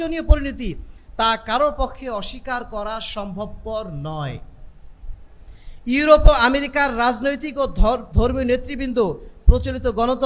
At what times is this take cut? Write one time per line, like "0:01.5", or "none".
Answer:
none